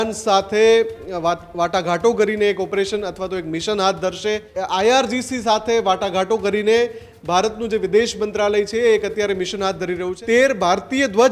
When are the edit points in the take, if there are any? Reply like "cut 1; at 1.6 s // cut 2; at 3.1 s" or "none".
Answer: cut 1; at 4.5 s // cut 2; at 10.1 s